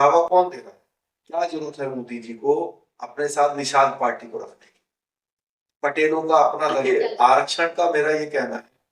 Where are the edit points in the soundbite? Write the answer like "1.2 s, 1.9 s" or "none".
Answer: 6.8 s